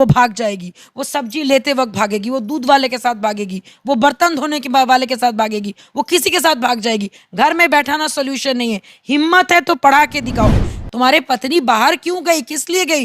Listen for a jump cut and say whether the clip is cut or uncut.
cut